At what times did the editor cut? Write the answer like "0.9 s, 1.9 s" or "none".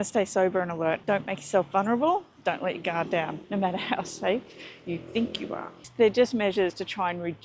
1.0 s, 3.4 s, 5.9 s